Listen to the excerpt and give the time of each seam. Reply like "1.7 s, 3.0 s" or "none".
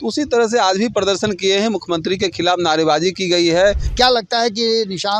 3.8 s